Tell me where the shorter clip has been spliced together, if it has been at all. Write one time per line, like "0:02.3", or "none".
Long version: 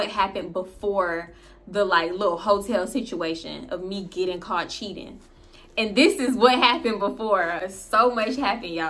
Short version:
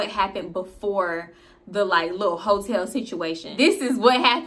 0:03.5

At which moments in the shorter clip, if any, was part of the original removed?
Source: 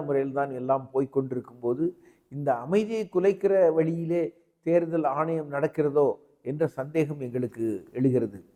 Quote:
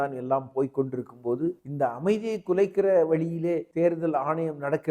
0:01.7
0:03.7

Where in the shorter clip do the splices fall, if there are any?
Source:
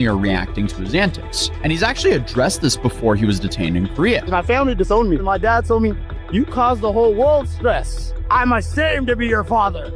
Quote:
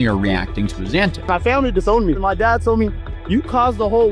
0:01.2

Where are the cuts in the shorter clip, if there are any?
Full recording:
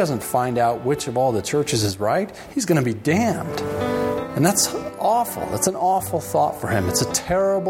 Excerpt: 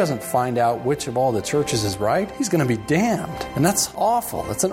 0:02.3
0:03.5

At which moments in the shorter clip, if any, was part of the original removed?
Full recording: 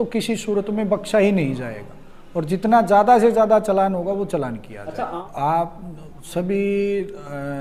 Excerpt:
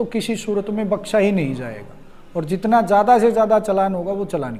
none

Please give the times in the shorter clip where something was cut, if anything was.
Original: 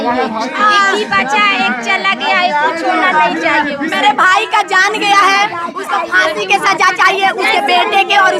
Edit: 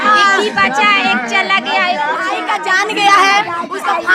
0:02.4

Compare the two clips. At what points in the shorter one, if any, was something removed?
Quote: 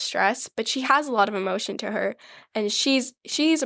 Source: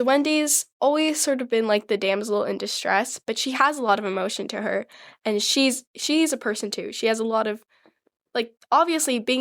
none

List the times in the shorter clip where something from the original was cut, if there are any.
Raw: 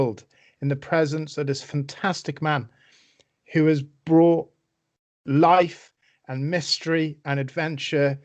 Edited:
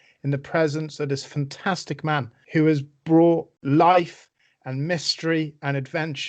0:02.4
0:03.5

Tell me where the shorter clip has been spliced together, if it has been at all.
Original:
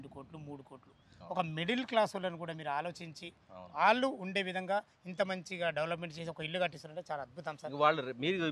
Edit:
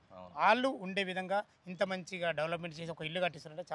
none

